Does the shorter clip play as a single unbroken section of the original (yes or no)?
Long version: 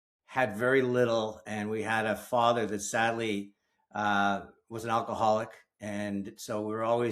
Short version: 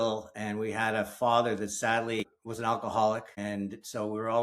no